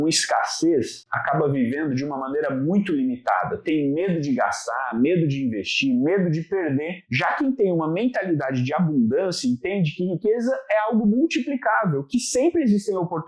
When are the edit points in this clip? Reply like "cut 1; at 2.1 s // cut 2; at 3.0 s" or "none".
none